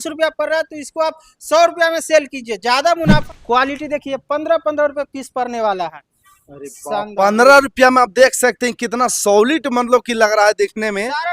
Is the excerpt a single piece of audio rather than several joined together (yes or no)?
no